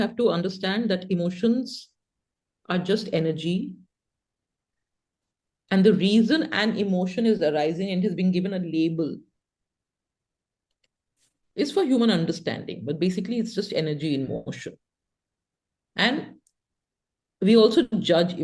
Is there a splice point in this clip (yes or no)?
no